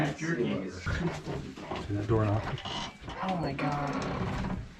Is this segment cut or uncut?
uncut